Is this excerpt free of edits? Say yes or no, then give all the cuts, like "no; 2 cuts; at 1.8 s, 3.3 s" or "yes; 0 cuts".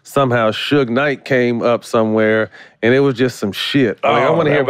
yes; 0 cuts